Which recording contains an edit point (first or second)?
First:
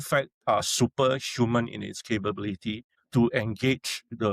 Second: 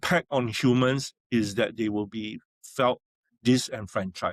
first